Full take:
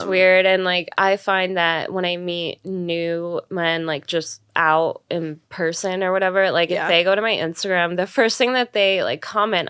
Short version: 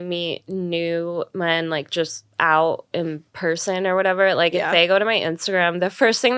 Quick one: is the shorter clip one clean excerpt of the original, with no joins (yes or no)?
yes